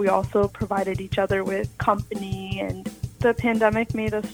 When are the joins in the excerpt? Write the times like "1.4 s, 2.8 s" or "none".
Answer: 1.7 s, 3.1 s